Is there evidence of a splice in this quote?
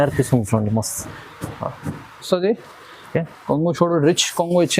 yes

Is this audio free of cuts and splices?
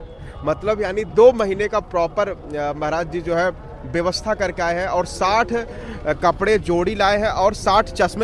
yes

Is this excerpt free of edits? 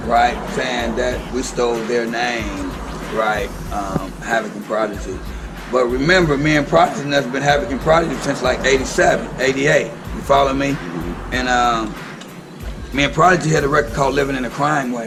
yes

